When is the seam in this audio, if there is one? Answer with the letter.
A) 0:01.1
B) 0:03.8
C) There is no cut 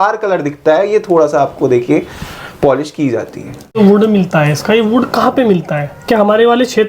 B